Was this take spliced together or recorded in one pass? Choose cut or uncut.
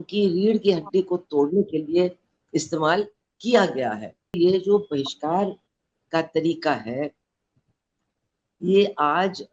cut